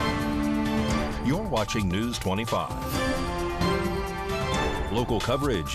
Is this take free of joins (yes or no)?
yes